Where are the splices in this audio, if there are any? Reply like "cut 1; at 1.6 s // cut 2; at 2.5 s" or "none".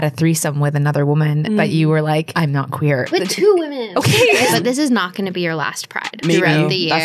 cut 1; at 3.1 s // cut 2; at 4.5 s // cut 3; at 6.2 s